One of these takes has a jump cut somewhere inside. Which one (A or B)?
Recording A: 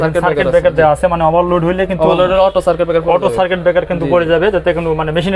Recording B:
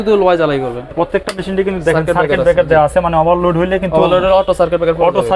B